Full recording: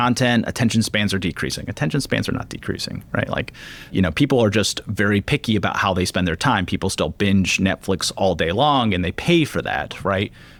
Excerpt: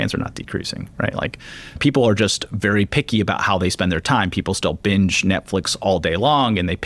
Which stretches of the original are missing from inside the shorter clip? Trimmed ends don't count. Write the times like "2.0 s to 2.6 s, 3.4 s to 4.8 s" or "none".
3.9 s to 4.1 s